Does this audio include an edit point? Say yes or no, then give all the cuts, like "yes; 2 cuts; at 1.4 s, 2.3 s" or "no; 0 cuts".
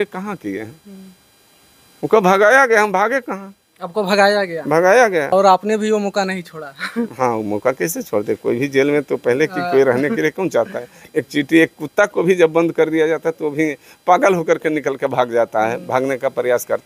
yes; 1 cut; at 5.3 s